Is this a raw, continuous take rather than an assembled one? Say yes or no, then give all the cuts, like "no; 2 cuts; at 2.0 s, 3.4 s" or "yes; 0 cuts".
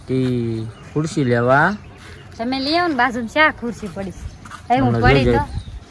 yes; 0 cuts